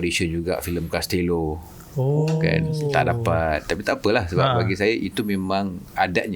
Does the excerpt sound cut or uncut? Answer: uncut